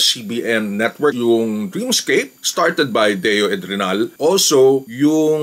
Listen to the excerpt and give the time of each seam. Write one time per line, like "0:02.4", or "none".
0:01.1
0:02.4
0:04.2